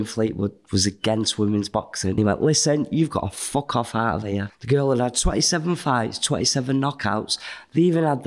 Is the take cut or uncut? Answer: cut